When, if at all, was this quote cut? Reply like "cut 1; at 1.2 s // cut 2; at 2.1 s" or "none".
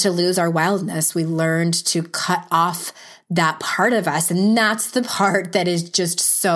none